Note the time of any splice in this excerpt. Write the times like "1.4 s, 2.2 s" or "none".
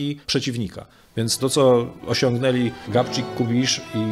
none